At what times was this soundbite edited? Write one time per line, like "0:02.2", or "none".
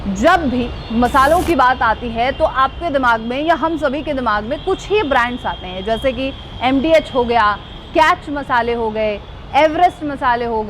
none